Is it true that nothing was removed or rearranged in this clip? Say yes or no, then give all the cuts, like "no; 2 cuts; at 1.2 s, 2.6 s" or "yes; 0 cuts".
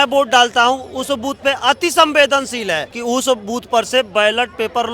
no; 1 cut; at 2.9 s